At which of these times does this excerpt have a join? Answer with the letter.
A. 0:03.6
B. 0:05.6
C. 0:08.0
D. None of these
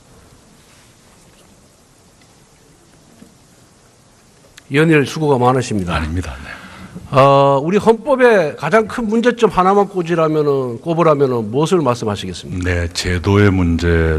C